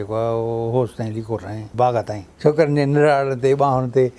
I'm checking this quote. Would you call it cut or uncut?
cut